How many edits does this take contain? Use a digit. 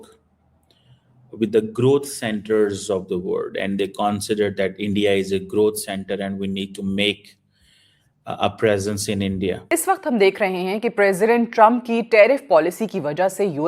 1